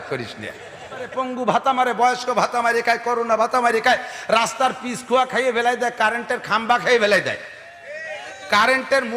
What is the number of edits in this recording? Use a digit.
1